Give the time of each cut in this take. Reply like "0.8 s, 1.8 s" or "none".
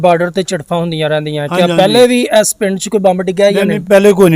none